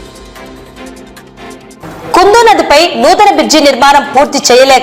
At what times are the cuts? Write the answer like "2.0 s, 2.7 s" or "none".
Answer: 0.7 s, 1.6 s